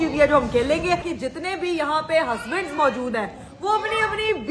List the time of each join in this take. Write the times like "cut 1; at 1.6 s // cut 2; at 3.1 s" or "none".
cut 1; at 1.1 s